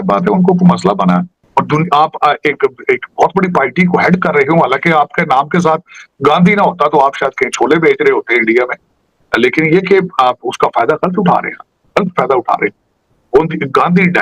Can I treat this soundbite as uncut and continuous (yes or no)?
no